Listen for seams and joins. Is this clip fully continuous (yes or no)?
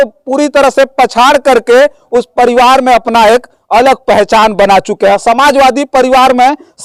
yes